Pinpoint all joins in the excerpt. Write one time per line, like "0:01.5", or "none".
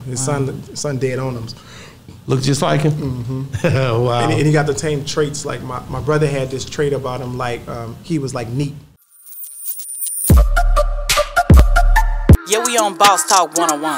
0:09.0